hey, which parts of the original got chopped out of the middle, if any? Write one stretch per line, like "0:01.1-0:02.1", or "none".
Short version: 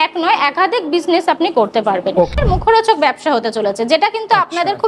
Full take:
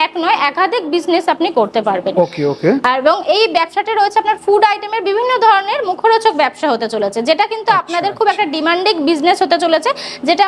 0:02.3-0:05.7